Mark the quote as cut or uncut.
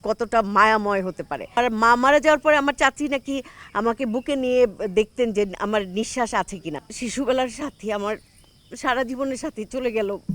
cut